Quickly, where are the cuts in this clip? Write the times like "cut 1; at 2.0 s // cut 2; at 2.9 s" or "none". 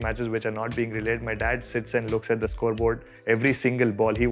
none